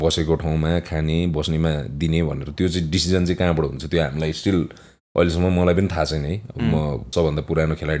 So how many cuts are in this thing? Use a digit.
1